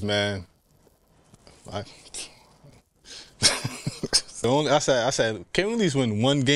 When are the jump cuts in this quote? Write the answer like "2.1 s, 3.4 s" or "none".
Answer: 4.4 s